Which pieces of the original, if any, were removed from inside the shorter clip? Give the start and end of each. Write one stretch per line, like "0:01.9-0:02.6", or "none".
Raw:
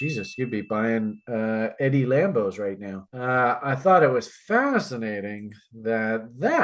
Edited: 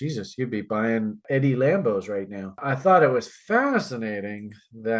0:01.2-0:01.7
0:03.1-0:03.6